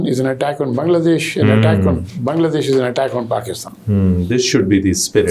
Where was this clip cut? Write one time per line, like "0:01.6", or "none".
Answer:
none